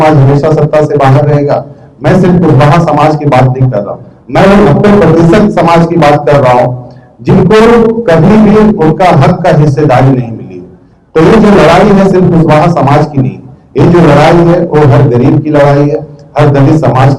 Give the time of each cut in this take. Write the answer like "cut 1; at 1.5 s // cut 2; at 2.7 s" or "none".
none